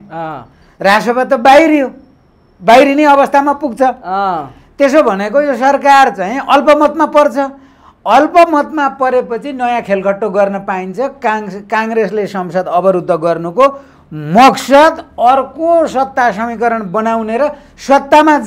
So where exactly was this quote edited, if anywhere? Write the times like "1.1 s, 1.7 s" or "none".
none